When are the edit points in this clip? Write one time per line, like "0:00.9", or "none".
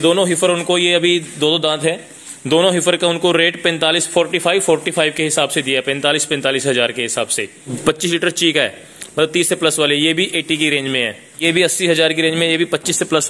0:07.7
0:11.4